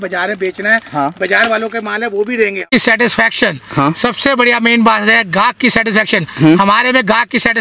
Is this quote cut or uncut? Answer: cut